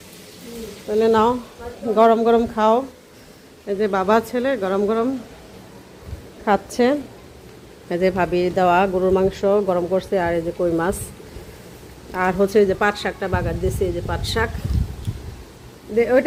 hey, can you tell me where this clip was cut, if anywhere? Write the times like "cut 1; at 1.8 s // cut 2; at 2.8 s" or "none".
none